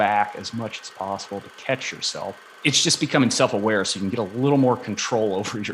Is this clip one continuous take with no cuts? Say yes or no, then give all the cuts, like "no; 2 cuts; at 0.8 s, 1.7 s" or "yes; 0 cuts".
no; 1 cut; at 2.6 s